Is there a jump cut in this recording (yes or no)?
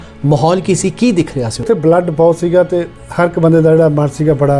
yes